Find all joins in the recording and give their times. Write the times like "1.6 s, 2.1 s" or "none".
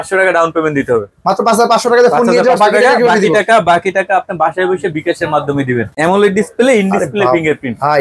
5.9 s